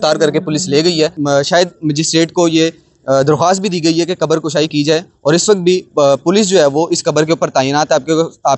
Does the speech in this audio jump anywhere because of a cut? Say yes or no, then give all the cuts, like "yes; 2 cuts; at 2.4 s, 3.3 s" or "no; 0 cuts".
yes; 1 cut; at 1.2 s